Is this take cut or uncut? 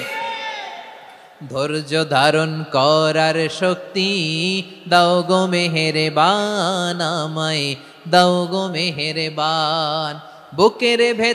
uncut